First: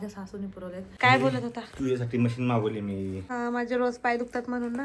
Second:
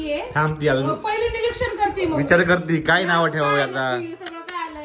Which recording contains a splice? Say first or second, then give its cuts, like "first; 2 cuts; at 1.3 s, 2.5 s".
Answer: first; 2 cuts; at 0.8 s, 3.2 s